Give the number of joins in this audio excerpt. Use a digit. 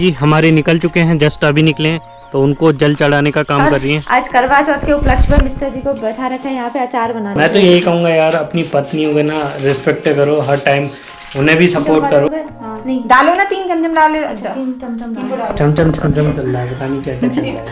3